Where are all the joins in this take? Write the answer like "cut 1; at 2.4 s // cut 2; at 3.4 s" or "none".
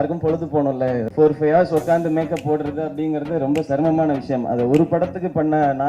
cut 1; at 1.1 s